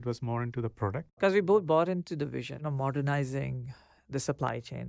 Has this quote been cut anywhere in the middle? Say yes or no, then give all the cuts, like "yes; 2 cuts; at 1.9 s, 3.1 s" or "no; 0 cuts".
yes; 2 cuts; at 1.2 s, 2.6 s